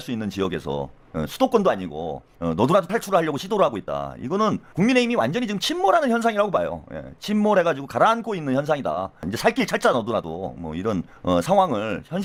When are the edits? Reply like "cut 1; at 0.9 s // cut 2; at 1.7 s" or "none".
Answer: none